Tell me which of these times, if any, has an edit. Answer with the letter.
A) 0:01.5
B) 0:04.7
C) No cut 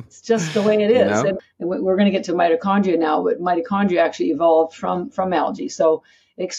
A